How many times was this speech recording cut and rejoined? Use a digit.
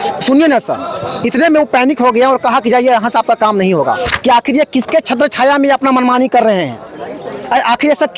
1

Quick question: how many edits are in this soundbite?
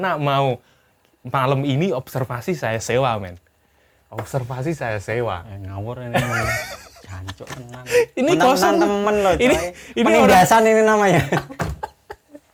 0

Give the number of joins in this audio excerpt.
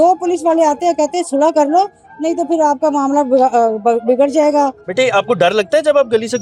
1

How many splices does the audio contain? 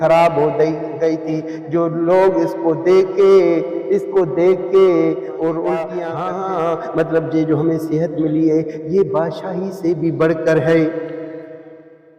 1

